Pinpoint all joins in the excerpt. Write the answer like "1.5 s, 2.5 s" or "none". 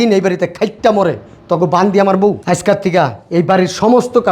2.4 s